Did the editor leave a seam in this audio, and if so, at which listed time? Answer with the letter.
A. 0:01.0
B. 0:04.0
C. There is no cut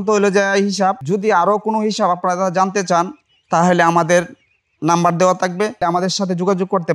A